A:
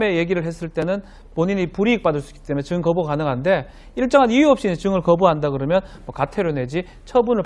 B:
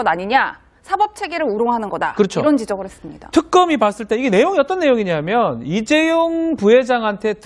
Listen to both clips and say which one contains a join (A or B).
B